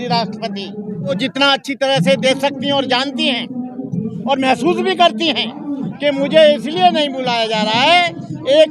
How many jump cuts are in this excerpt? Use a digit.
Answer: 1